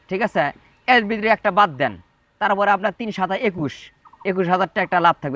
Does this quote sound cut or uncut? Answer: uncut